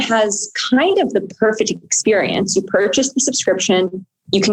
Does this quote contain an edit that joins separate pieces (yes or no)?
no